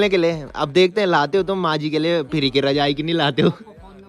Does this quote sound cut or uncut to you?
uncut